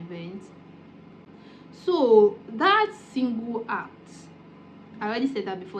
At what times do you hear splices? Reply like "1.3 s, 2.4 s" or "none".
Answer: none